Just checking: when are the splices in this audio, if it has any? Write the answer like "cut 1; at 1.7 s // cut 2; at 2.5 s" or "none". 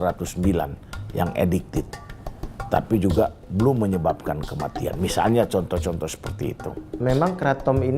cut 1; at 6.9 s